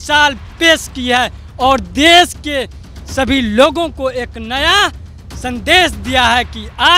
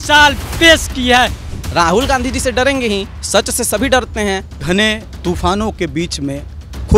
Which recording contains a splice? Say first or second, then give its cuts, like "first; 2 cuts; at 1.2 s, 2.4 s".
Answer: second; 3 cuts; at 1.4 s, 3.2 s, 4.6 s